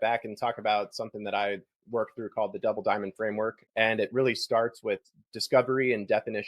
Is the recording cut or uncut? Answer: cut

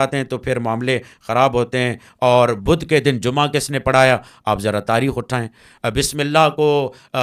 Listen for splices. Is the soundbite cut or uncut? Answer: uncut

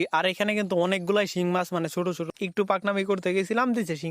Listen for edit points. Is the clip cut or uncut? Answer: cut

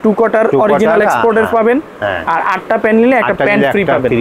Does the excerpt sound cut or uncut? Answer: uncut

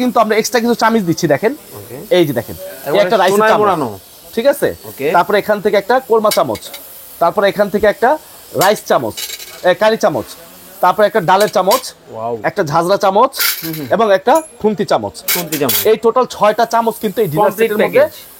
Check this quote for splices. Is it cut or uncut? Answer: uncut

